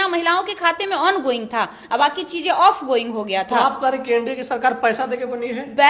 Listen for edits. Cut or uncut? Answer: uncut